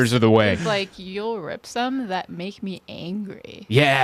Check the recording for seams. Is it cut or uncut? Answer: uncut